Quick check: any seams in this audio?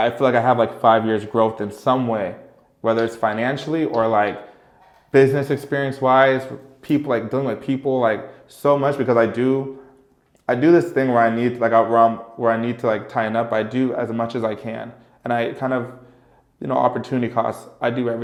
no; 0 cuts

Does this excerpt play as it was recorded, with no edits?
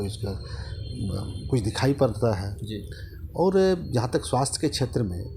yes; 0 cuts

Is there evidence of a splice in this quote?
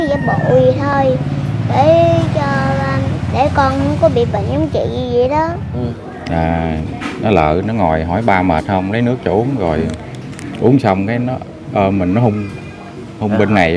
yes; 1 cut; at 5.9 s

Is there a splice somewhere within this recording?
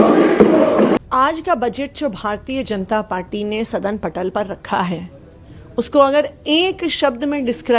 yes; 1 cut; at 1.0 s

